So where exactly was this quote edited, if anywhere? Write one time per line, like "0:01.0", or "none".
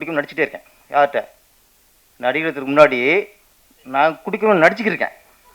none